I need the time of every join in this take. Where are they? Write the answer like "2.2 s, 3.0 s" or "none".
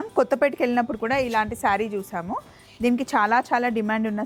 none